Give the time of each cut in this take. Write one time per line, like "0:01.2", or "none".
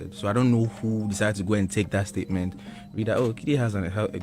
none